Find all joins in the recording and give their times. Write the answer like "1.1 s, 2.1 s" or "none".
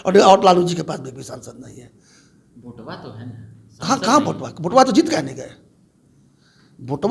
none